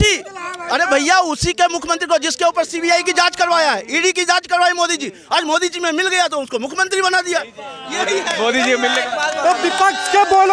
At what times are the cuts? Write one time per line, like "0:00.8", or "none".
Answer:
none

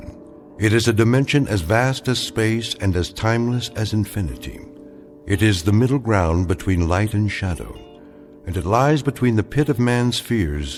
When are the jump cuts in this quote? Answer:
none

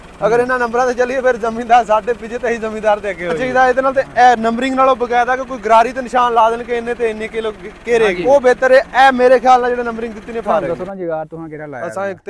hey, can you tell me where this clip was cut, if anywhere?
0:03.4
0:08.2
0:10.7

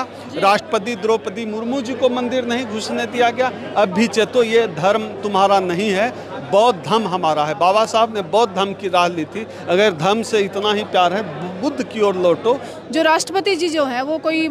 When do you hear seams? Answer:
0:12.7

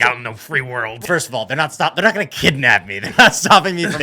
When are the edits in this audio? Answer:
0:01.0

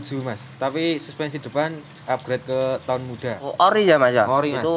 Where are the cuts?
0:03.5

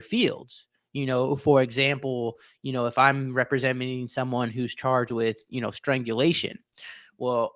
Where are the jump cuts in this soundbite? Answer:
none

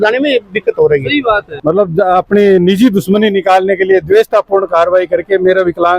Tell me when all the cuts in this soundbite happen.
0:01.5

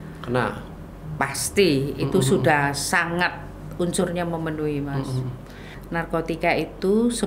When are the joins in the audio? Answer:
0:05.8

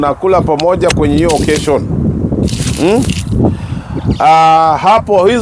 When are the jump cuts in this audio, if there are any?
none

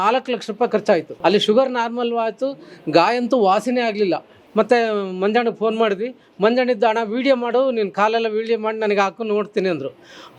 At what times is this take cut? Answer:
0:01.1
0:04.3

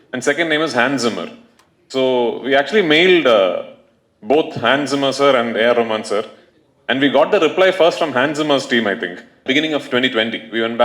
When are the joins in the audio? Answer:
0:09.4

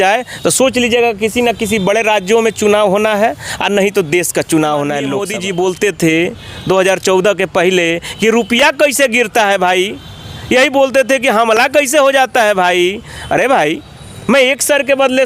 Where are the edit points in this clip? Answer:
0:05.3

